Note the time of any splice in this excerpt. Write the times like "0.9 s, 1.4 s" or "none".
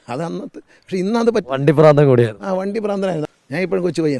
3.2 s